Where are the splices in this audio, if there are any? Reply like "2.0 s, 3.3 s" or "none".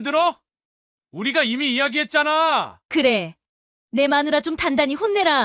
2.8 s